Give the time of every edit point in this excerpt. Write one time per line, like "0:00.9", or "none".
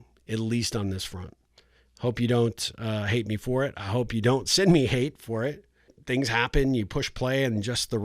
0:06.0